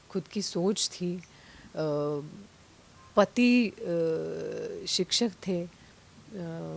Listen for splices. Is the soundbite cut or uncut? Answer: uncut